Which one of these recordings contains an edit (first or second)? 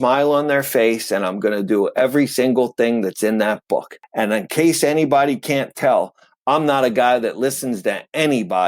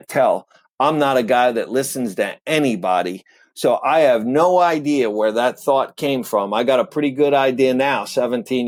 first